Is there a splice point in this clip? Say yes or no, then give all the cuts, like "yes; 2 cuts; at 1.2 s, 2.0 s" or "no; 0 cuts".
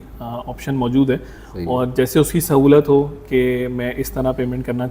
no; 0 cuts